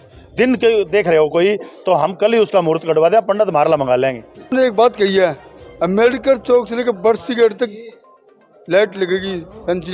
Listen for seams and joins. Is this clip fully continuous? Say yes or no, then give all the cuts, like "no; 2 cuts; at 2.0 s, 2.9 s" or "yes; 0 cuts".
no; 1 cut; at 4.5 s